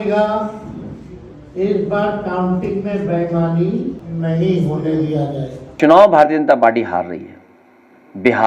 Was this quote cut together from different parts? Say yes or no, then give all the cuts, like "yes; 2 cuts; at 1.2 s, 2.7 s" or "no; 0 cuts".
yes; 2 cuts; at 4.0 s, 5.6 s